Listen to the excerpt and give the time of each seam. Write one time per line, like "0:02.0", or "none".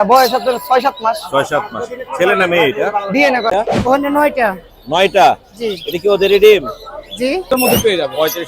0:03.5
0:07.6